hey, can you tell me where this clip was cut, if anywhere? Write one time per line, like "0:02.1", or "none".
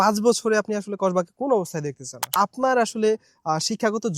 0:02.3